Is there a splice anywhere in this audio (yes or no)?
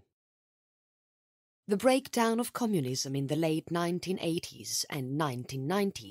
no